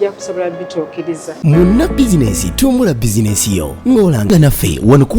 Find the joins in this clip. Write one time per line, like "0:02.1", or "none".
0:01.3

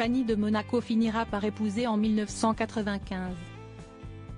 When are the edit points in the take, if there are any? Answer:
none

